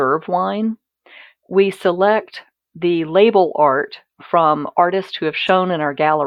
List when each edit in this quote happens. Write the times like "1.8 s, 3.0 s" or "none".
none